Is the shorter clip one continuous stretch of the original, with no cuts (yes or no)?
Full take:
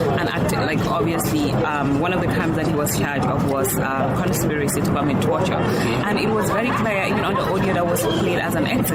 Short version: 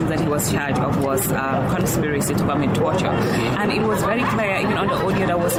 yes